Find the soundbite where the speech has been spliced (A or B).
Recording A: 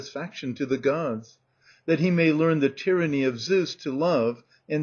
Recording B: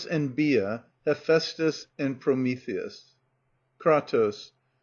A